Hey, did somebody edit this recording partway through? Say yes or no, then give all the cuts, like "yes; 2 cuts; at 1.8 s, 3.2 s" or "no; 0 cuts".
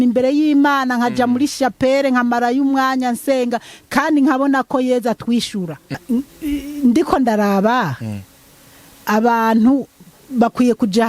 yes; 1 cut; at 6.0 s